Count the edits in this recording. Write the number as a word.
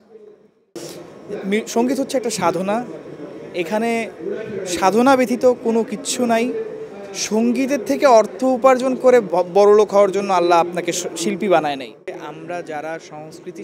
two